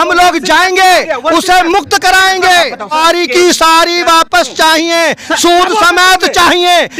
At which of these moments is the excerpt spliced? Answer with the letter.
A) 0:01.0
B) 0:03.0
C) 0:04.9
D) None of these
B